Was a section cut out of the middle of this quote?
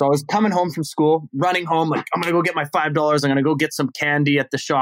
no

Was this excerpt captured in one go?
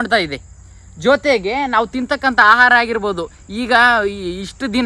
yes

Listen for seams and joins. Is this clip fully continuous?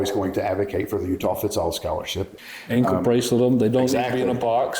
no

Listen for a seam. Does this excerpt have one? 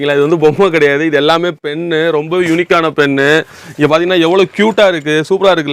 no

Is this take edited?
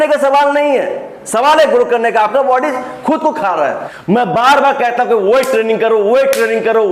yes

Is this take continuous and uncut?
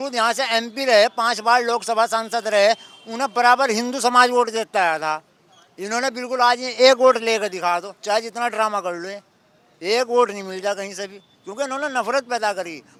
yes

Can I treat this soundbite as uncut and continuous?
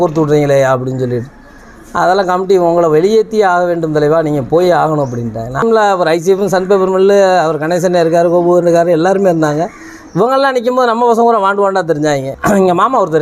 no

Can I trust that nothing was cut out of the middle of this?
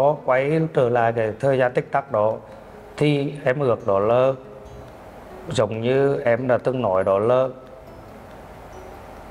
yes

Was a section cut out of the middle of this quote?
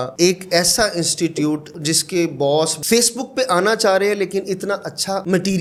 no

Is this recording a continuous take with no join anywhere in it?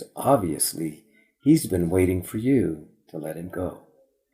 yes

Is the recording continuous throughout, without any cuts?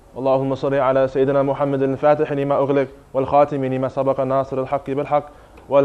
no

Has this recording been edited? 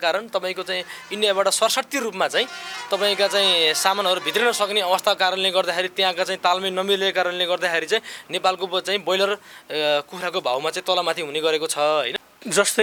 no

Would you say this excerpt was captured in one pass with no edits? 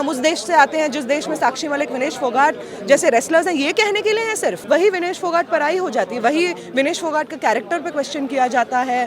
no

